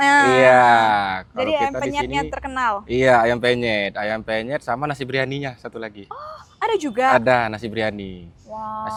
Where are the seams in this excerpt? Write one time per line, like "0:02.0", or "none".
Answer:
none